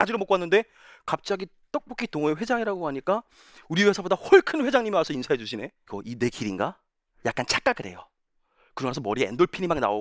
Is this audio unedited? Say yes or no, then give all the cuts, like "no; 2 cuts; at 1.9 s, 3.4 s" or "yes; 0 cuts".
no; 1 cut; at 5.8 s